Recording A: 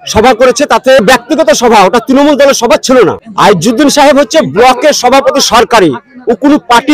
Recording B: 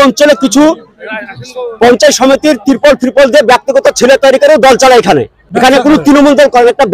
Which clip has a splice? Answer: A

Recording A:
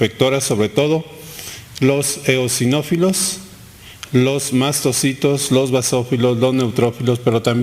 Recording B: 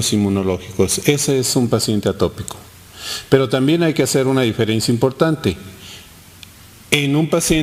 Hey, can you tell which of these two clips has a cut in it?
A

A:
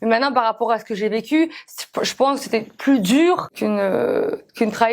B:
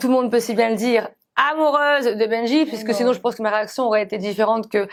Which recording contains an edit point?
A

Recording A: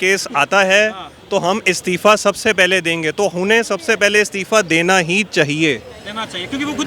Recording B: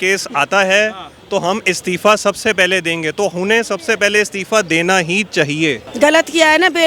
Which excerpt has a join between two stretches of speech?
B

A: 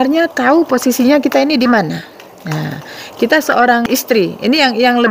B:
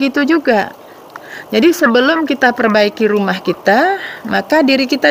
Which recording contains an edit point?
A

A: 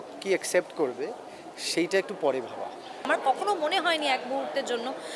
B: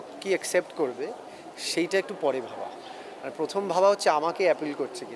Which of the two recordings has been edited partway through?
A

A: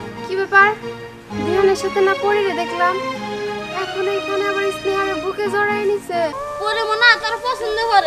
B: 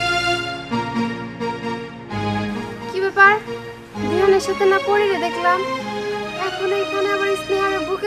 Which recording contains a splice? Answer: A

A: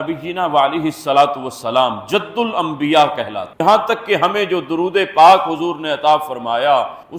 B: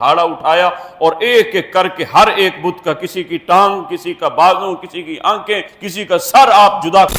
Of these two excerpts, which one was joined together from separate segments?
A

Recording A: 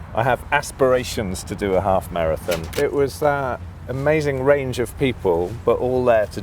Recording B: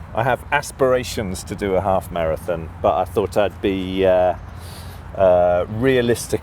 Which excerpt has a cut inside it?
A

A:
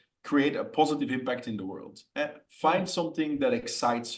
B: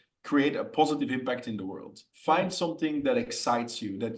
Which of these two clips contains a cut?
B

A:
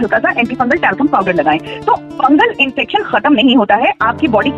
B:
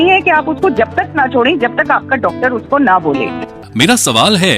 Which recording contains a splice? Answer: B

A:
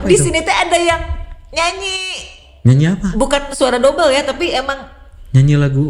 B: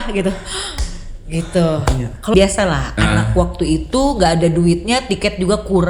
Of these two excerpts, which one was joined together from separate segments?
B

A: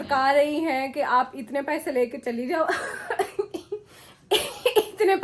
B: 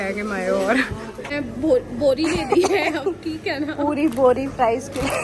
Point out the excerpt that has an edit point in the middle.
B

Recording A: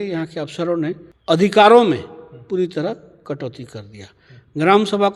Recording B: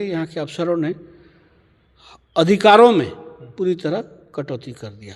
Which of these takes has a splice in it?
A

